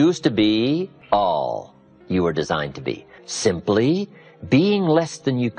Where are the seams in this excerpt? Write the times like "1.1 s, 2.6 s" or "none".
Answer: 1.0 s, 3.1 s